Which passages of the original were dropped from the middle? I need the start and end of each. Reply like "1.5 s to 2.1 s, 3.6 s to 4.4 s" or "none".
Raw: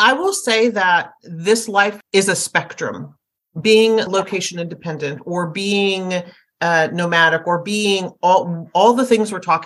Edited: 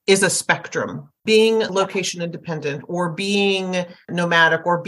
3.1 s to 3.4 s, 6.5 s to 6.9 s